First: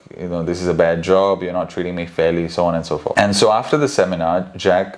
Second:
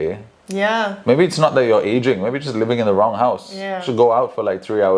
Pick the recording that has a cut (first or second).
first